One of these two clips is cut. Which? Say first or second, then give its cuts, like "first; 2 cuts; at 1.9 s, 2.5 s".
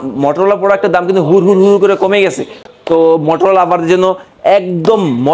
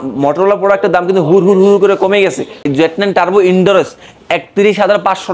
second; 1 cut; at 2.7 s